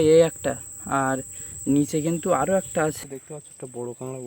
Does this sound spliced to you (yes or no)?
yes